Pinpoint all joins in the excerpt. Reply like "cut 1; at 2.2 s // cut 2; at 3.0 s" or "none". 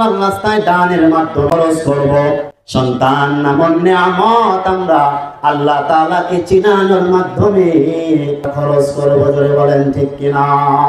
cut 1; at 1.5 s // cut 2; at 2.6 s